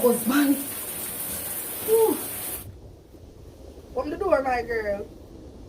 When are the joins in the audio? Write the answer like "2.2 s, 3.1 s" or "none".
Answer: 2.6 s, 4.3 s